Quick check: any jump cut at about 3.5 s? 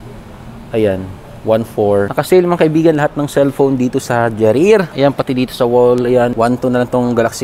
no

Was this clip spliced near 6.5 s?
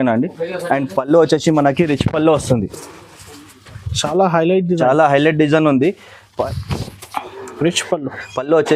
yes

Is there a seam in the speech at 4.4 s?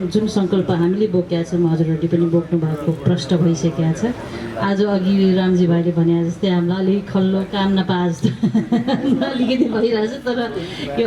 no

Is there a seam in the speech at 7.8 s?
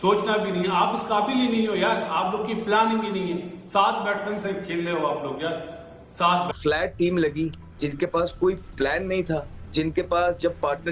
no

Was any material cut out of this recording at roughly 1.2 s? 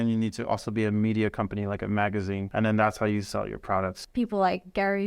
no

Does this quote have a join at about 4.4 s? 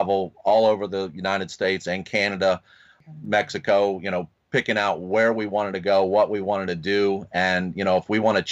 no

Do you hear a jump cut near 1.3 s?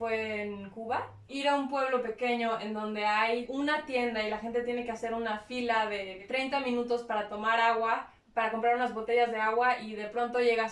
yes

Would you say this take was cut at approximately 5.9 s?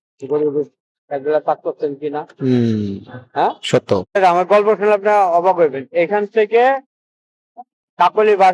no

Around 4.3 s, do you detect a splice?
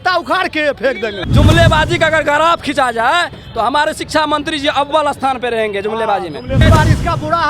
no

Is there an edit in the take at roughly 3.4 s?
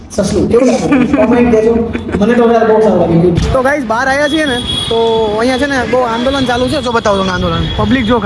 yes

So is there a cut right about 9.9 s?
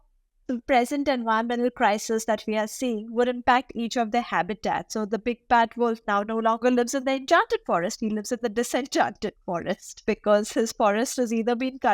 yes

